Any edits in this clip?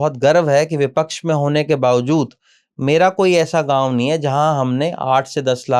no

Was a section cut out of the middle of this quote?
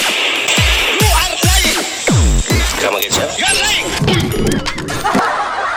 no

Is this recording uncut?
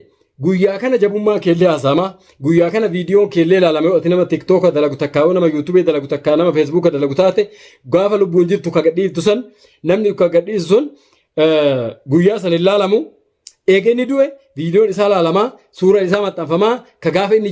yes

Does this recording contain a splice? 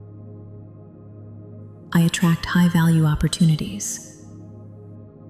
yes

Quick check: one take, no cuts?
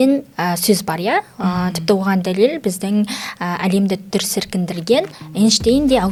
yes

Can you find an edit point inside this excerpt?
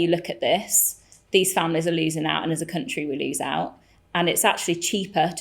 no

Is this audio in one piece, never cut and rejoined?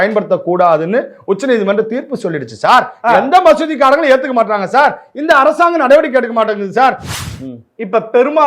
no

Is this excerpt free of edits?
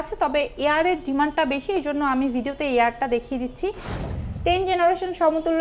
no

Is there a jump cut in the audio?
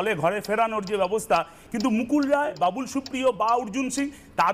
yes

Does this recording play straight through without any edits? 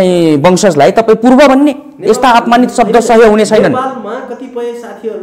yes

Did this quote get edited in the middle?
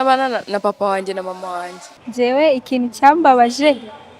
yes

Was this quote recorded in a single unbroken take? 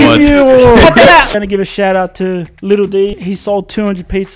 no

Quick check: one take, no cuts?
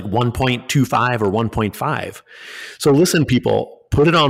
yes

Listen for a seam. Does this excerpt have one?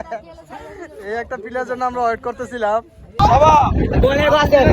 yes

